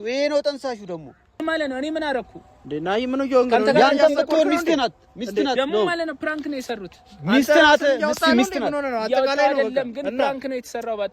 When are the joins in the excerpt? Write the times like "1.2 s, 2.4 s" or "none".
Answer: 1.7 s